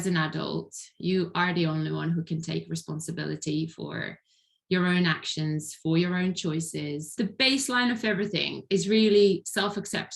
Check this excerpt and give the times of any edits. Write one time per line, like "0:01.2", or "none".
0:07.1